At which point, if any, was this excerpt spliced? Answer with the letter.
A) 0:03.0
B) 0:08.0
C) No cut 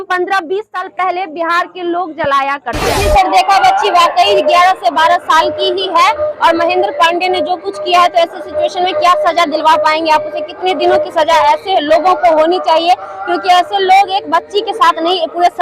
A